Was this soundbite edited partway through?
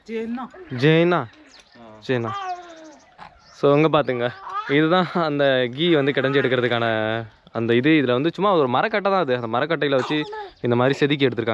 no; 0 cuts

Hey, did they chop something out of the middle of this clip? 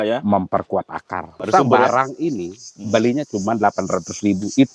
yes; 1 cut; at 1.5 s

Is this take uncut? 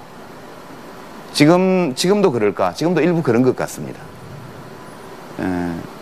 no; 1 cut; at 1.3 s

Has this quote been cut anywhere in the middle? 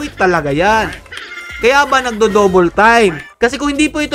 no; 0 cuts

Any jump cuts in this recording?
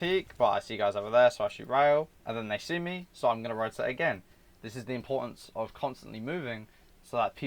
no; 0 cuts

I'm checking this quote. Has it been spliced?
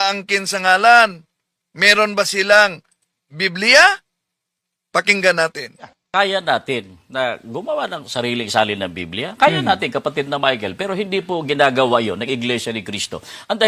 yes; 1 cut; at 6.0 s

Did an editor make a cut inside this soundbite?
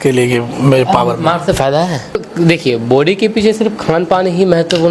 yes; 1 cut; at 2.3 s

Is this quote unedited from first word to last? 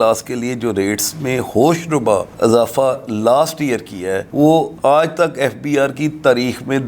yes; 0 cuts

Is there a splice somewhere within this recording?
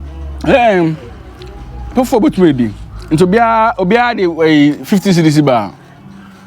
no; 0 cuts

